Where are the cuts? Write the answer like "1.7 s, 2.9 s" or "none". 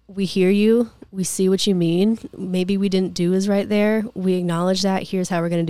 none